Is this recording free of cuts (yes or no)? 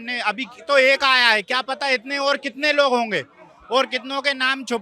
yes